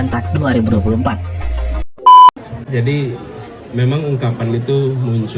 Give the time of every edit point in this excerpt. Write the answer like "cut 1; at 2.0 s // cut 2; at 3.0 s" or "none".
cut 1; at 1.9 s